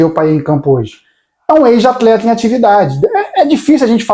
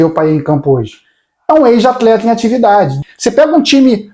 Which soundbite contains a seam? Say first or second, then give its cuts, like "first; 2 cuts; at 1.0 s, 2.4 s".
second; 1 cut; at 2.9 s